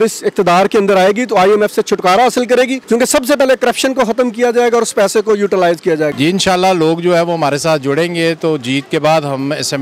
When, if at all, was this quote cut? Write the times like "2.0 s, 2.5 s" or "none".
2.8 s, 6.1 s